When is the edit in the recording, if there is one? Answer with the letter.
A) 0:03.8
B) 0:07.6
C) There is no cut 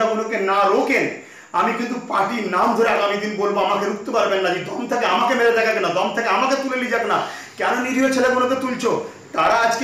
C